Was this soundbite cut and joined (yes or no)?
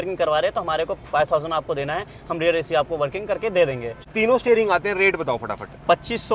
yes